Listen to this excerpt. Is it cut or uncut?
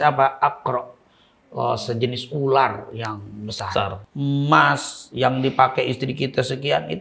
cut